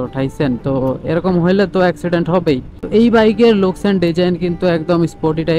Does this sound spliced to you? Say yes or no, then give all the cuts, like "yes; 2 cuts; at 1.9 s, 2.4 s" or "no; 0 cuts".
yes; 1 cut; at 2.7 s